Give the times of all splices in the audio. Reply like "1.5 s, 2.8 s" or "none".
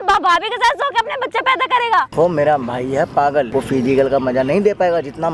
2.1 s, 3.5 s